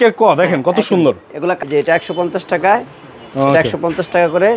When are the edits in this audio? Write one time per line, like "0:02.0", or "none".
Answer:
0:01.6